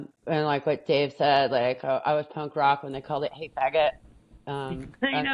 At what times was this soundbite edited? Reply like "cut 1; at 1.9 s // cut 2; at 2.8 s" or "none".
none